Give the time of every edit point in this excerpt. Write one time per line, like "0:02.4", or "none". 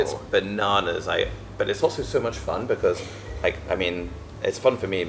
none